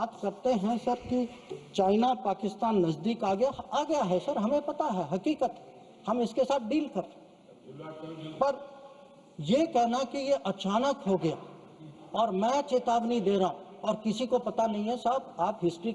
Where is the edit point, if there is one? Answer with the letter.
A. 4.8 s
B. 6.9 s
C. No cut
C